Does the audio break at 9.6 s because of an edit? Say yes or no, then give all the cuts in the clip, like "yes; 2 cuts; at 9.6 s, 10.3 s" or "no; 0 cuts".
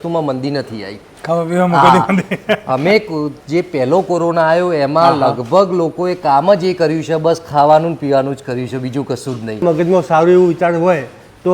yes; 1 cut; at 9.6 s